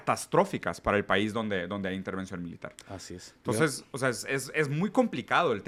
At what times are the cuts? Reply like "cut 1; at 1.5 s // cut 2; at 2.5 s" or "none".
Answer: none